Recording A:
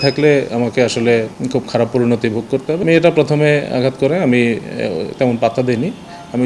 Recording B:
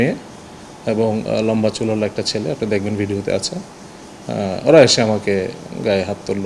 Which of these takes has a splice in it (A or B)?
A